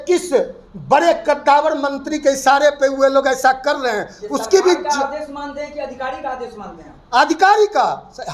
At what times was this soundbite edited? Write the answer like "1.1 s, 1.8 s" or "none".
none